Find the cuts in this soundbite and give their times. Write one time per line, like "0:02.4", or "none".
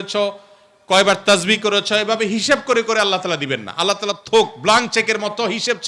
none